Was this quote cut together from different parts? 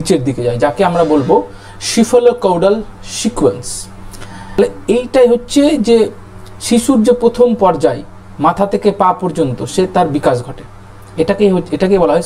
yes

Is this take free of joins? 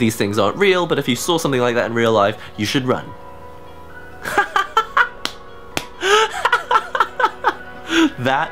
yes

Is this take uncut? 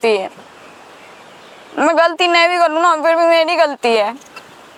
yes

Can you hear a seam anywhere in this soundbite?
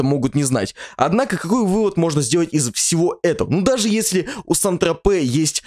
no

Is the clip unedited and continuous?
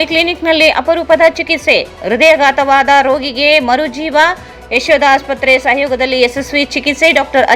yes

